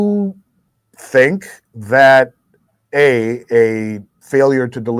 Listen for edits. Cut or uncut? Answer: uncut